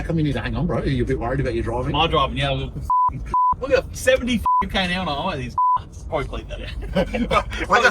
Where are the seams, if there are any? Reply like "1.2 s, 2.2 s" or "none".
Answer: 6.0 s